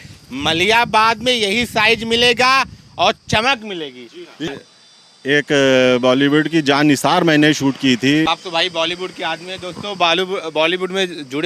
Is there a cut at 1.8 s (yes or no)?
no